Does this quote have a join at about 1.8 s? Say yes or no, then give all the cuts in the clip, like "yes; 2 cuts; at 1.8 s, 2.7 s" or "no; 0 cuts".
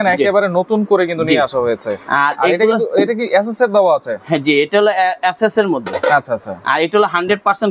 no; 0 cuts